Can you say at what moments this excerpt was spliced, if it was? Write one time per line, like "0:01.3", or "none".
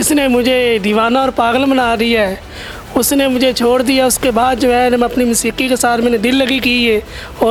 none